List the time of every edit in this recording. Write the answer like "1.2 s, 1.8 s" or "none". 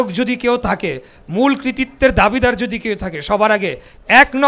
none